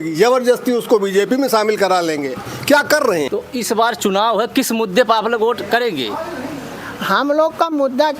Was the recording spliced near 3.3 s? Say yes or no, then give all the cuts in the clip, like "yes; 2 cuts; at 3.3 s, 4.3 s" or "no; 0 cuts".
yes; 1 cut; at 3.3 s